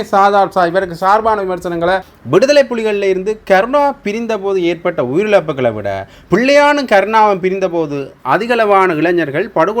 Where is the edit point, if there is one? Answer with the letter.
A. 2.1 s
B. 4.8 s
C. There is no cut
A